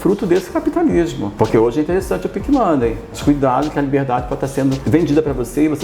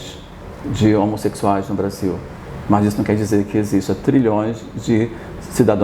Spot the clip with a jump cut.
first; 3 cuts; at 1.2 s, 3.1 s, 4.8 s

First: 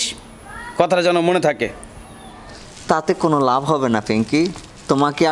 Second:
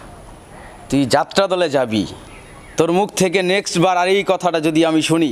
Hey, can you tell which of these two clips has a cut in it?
first; 1 cut; at 2.4 s

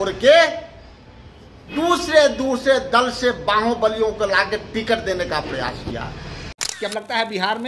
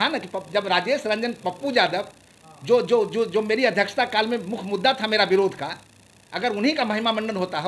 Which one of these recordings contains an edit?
first; 1 cut; at 6.6 s

